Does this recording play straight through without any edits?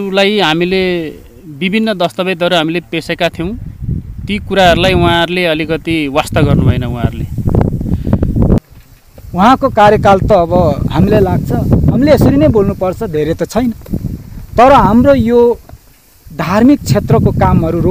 no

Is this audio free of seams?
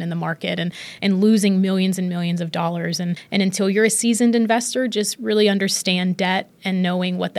no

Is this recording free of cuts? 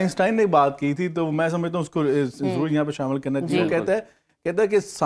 yes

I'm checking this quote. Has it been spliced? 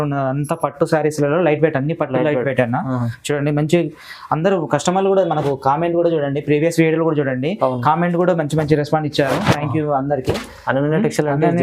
no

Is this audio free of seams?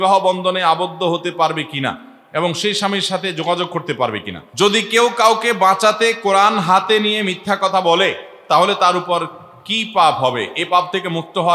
no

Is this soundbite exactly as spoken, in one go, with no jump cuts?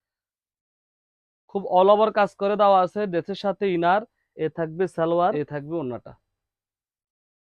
no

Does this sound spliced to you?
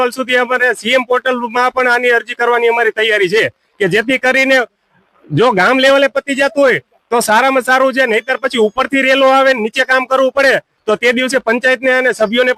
no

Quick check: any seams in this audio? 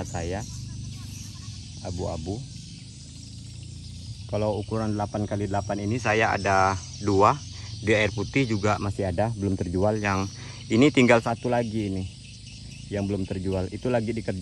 no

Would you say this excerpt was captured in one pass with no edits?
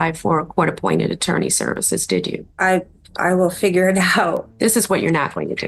no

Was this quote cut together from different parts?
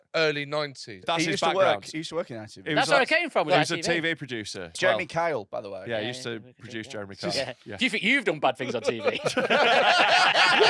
yes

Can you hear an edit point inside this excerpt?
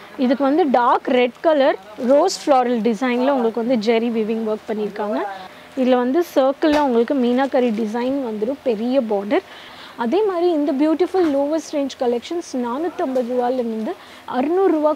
yes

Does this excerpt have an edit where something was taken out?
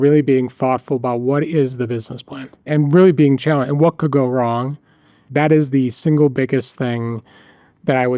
yes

